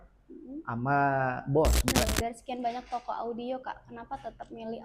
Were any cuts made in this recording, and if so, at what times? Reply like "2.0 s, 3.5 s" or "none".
2.1 s